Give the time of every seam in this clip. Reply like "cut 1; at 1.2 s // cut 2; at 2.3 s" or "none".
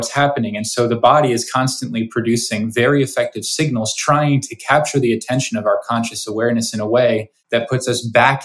cut 1; at 7.3 s